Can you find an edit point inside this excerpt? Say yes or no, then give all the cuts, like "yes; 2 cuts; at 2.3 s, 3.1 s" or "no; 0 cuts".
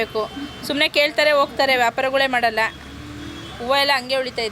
no; 0 cuts